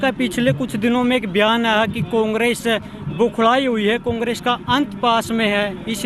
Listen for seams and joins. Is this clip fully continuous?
yes; 0 cuts

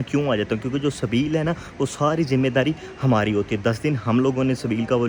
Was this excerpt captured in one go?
yes; 0 cuts

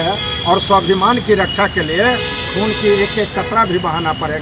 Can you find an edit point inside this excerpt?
no; 0 cuts

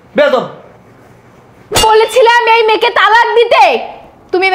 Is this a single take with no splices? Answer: no; 1 cut; at 1.8 s

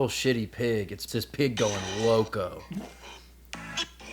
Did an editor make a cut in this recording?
yes; 1 cut; at 1.0 s

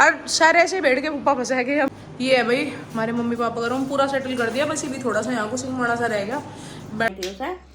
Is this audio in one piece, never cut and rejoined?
no; 2 cuts; at 1.9 s, 7.1 s

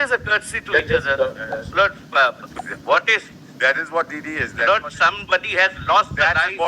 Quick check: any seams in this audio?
yes; 1 cut; at 2.6 s

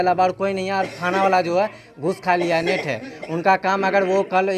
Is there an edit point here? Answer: no; 0 cuts

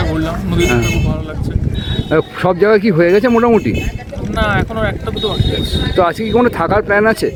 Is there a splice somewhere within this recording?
no; 0 cuts

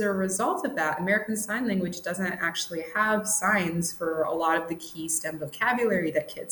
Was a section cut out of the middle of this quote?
no; 0 cuts

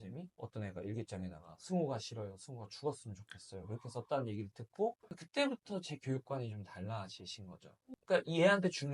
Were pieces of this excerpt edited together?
no; 0 cuts

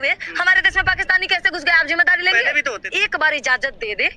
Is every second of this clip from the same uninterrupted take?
no; 1 cut; at 2.8 s

